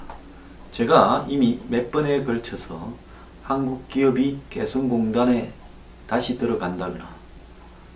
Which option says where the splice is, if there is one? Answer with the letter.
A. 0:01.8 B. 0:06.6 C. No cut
A